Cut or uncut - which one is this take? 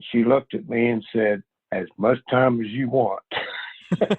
cut